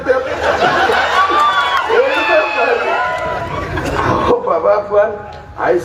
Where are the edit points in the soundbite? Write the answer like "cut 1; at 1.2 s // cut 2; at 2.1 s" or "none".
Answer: cut 1; at 3.5 s

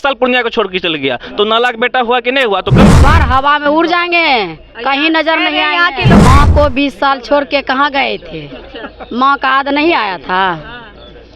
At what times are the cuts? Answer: cut 1; at 2.9 s // cut 2; at 6.2 s

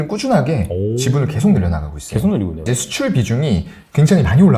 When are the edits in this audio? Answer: cut 1; at 2.7 s

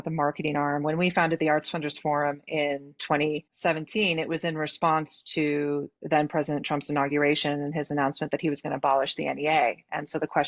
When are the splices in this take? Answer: cut 1; at 3.5 s

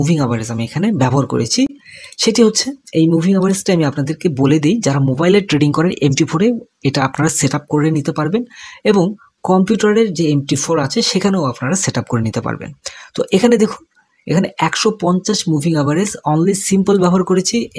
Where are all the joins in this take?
none

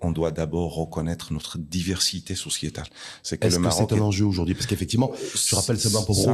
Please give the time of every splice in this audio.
none

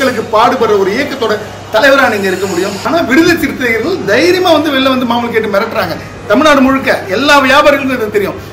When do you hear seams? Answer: cut 1; at 2.8 s

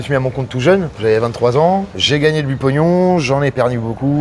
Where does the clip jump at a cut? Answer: cut 1; at 0.9 s

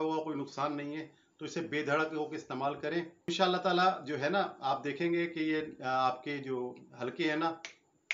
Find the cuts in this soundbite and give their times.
cut 1; at 3.3 s

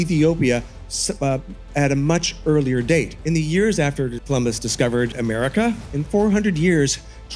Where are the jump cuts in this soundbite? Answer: cut 1; at 3.2 s // cut 2; at 4.2 s // cut 3; at 5.2 s

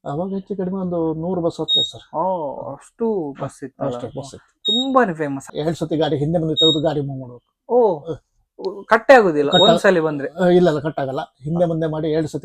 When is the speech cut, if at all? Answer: cut 1; at 5.5 s

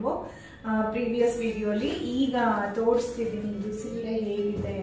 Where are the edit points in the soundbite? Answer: none

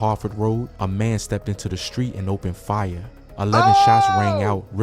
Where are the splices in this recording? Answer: none

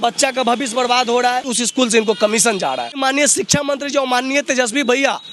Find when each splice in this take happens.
cut 1; at 1.5 s // cut 2; at 3.0 s

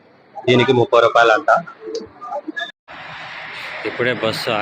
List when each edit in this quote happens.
cut 1; at 2.7 s

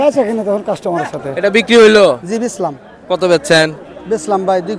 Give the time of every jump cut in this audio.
cut 1; at 1.2 s

